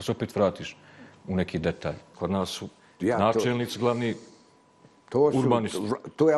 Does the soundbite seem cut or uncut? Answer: cut